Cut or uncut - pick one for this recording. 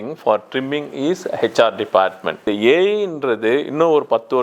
cut